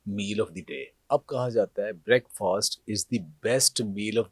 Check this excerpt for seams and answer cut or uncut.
cut